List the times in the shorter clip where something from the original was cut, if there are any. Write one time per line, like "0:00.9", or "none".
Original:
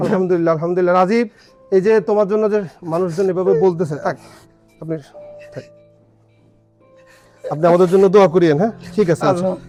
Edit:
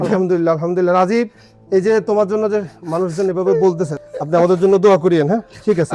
0:03.9